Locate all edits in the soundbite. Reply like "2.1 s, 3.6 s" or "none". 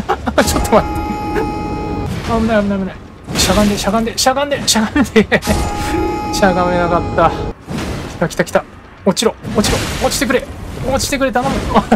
2.1 s, 7.5 s